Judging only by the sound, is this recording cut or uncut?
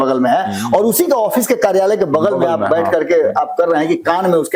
uncut